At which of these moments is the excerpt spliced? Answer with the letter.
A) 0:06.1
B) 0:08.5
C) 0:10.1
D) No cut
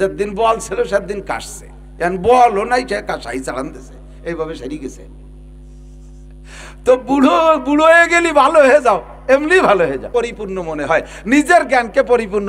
C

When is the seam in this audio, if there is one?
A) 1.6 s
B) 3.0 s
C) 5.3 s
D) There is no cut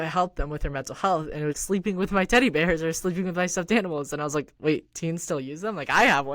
A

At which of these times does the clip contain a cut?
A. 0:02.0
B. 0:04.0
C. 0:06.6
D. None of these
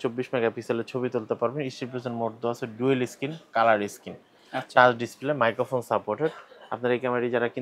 D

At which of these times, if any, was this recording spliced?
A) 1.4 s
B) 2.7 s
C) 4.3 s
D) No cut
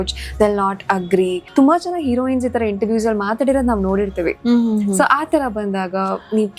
A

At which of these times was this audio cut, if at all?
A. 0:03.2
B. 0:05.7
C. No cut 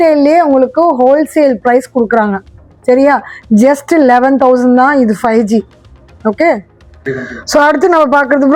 C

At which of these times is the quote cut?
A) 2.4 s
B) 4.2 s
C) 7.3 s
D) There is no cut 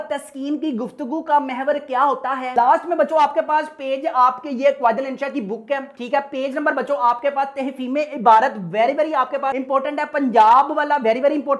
A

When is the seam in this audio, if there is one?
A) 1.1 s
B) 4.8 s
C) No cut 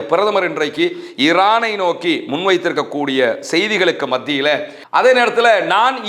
B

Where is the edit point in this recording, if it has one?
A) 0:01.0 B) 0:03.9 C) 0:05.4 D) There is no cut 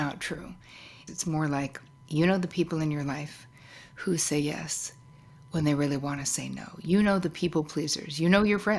A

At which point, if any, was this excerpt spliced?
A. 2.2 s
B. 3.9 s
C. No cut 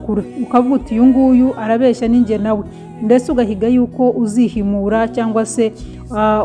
C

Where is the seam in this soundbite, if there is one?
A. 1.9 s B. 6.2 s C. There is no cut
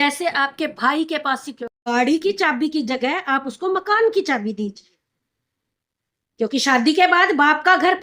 A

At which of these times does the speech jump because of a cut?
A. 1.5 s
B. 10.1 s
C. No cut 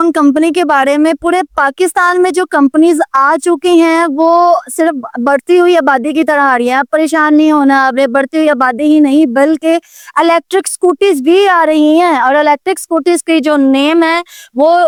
C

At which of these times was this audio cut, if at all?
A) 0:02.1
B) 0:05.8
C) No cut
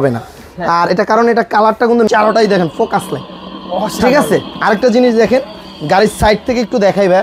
A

